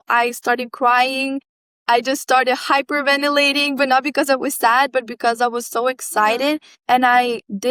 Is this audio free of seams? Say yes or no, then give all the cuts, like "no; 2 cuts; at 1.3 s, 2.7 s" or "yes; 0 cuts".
yes; 0 cuts